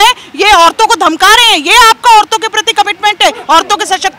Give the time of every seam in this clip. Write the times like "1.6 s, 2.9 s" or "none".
none